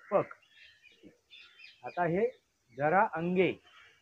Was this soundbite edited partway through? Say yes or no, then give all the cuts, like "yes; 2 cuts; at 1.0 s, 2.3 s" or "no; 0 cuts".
yes; 1 cut; at 1.0 s